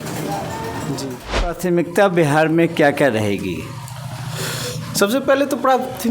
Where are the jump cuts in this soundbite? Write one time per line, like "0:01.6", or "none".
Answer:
0:01.6